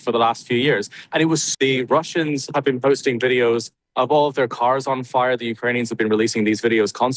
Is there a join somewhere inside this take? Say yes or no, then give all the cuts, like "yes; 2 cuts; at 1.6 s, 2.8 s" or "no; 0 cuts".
yes; 1 cut; at 1.5 s